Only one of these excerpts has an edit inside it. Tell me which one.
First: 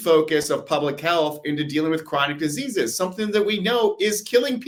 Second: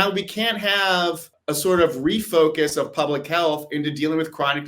second; 1 cut; at 1.3 s

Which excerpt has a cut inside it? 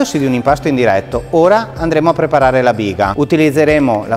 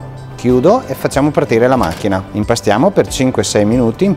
first; 1 cut; at 3.1 s

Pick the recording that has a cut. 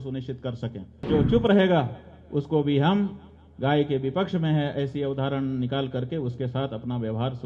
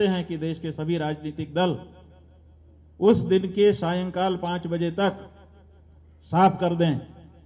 first; 1 cut; at 1.0 s

